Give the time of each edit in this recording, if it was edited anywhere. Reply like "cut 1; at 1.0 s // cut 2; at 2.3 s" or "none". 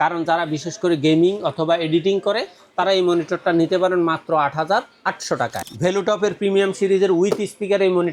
cut 1; at 5.6 s